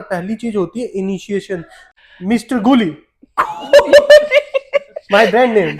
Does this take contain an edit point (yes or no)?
yes